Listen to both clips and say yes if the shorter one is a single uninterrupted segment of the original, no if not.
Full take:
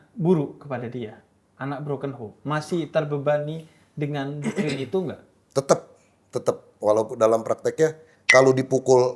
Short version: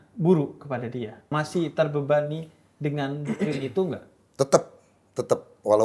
no